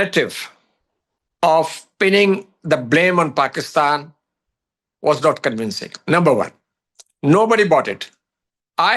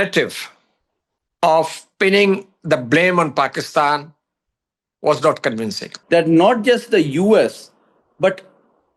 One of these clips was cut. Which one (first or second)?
second